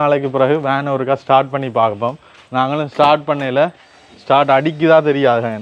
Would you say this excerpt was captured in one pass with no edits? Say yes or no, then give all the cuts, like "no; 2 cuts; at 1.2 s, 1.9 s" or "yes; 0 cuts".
yes; 0 cuts